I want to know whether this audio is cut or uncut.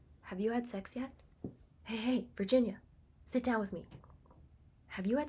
uncut